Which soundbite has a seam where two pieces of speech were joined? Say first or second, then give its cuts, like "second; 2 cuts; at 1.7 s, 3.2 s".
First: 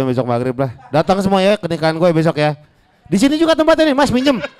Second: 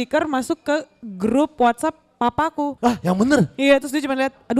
second; 1 cut; at 2.7 s